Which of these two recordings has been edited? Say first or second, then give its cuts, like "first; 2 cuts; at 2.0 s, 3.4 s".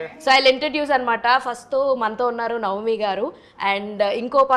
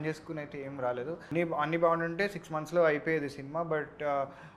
second; 1 cut; at 1.2 s